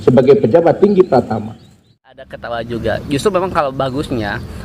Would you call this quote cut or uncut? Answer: cut